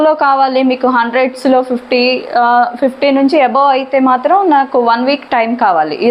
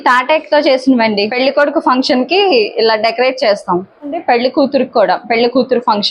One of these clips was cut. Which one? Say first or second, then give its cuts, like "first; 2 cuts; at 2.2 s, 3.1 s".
second; 2 cuts; at 1.3 s, 4.2 s